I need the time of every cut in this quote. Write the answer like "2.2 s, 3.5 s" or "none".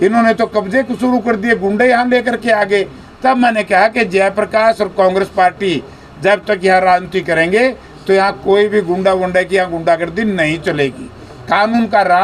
none